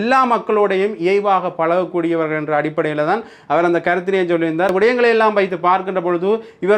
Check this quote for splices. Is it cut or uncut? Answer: cut